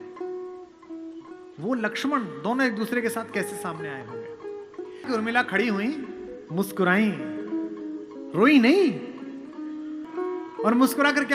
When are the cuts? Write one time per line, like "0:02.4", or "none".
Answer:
0:10.1